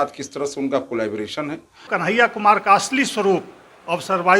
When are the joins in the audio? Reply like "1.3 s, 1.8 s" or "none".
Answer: 1.9 s